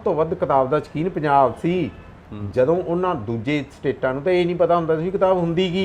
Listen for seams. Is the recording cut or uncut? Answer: uncut